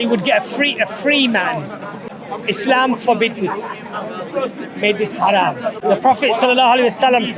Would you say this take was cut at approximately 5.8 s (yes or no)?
yes